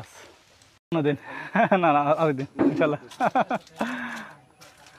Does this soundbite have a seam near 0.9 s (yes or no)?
yes